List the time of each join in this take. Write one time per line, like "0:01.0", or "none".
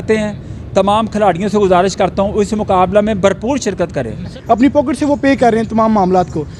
0:04.4

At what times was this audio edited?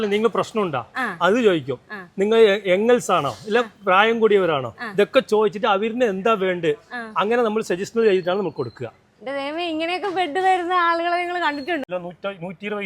0:11.9

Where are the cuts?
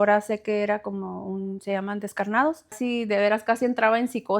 0:02.8

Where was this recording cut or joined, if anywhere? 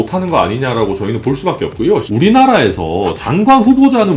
0:02.1

